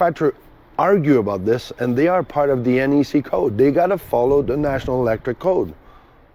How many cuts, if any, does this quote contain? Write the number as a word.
zero